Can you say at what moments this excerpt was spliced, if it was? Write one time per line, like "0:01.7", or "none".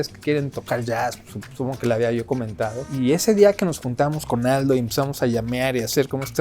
0:02.9